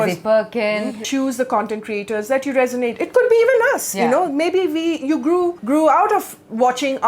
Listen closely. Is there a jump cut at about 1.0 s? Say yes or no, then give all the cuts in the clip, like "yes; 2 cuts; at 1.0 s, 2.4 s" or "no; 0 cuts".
yes; 1 cut; at 1.0 s